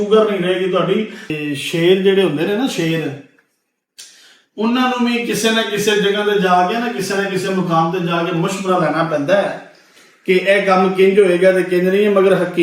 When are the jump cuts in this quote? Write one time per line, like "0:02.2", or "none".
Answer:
0:01.3